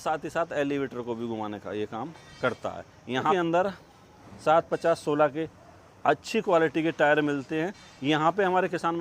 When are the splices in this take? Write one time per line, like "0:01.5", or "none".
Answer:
0:03.3